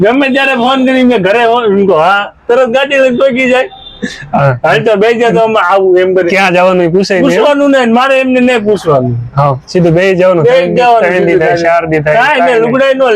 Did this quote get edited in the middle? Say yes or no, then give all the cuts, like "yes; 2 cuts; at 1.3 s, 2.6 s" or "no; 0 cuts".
no; 0 cuts